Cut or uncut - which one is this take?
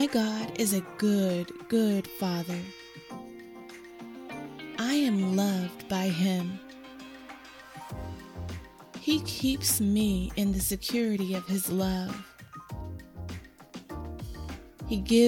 uncut